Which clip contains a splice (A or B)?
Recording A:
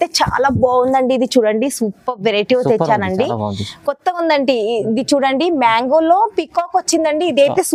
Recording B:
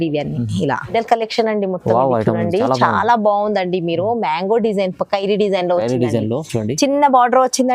B